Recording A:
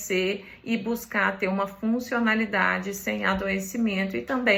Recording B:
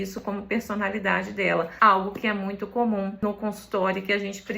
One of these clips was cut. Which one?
B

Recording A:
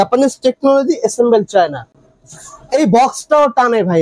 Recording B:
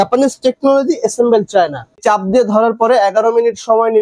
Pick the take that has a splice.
B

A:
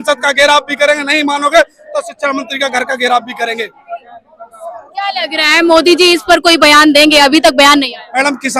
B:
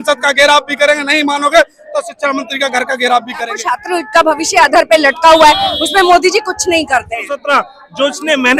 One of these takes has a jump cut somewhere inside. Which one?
B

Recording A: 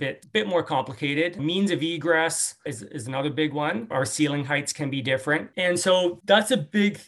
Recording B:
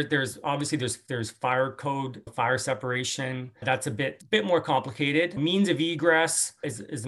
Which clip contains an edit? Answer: A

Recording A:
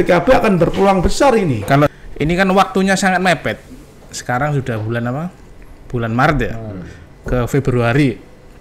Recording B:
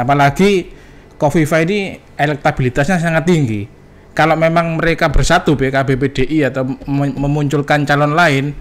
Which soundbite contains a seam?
A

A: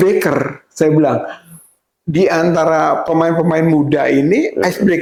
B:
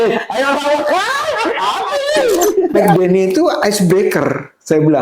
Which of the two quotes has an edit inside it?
B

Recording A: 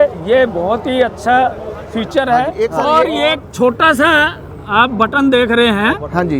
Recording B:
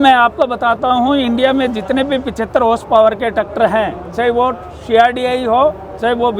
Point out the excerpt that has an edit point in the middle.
A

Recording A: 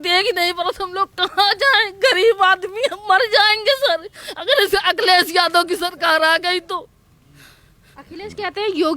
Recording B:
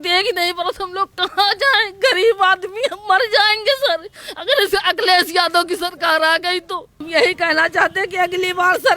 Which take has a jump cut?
B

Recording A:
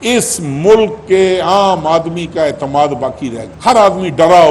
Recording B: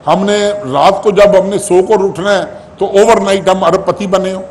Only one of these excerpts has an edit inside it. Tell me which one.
A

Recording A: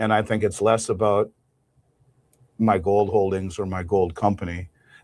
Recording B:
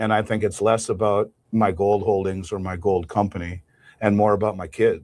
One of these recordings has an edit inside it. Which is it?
B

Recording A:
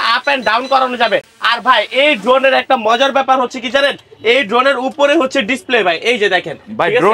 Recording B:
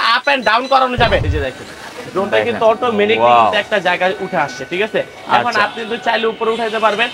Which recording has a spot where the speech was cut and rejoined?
B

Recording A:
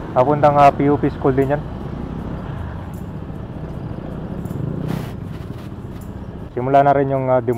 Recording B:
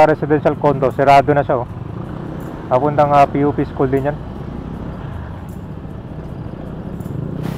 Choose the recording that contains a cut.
A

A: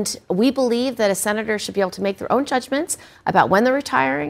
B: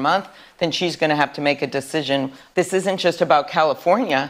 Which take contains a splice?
B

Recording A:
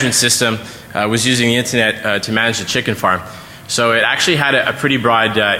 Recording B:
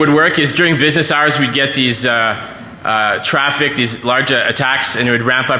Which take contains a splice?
A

